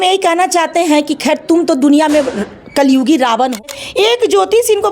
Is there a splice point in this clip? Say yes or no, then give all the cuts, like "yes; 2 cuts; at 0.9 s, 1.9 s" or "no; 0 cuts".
yes; 1 cut; at 3.8 s